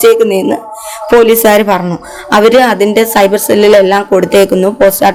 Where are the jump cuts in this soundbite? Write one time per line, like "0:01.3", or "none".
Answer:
none